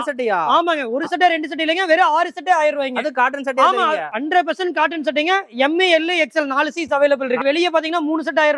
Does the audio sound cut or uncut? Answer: cut